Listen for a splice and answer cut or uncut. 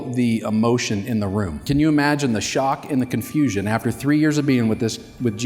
cut